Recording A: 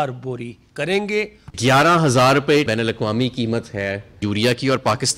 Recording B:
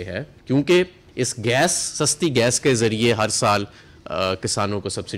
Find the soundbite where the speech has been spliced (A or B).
A